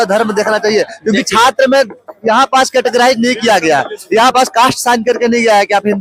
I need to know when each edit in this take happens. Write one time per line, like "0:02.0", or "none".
none